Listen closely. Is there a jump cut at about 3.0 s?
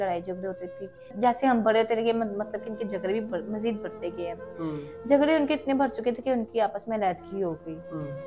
no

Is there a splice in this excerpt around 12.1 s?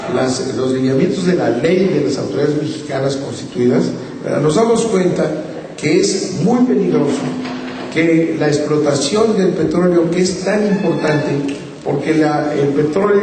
yes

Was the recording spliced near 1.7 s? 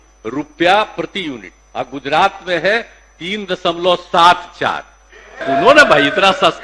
no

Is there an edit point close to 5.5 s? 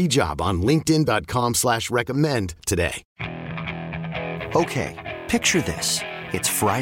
no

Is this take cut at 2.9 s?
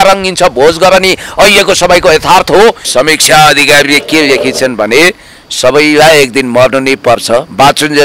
yes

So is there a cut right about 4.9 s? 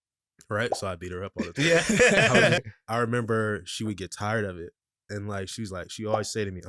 no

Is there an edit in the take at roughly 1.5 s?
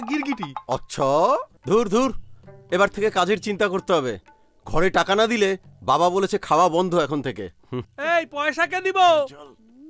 yes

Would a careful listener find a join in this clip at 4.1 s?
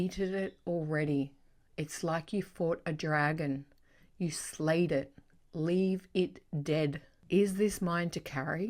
no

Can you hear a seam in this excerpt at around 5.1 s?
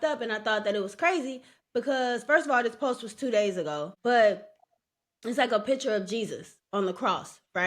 no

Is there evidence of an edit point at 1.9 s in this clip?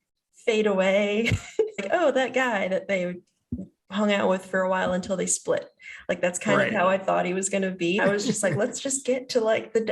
yes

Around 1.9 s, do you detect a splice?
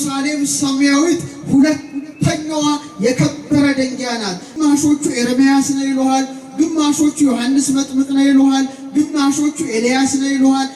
no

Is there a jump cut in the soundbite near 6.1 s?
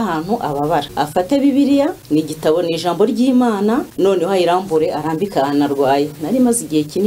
no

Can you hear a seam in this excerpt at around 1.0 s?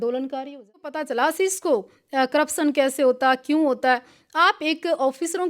yes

